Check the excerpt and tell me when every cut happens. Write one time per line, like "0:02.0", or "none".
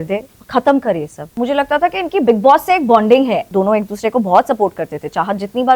0:01.3
0:03.4